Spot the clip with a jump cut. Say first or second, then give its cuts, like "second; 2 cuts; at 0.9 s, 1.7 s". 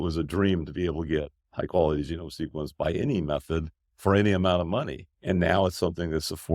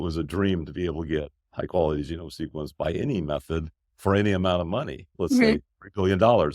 first; 1 cut; at 5.0 s